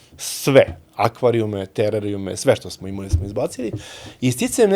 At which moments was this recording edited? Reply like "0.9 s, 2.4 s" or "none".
none